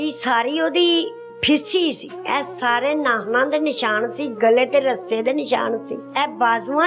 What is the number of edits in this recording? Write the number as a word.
three